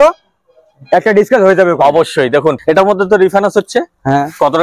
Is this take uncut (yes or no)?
no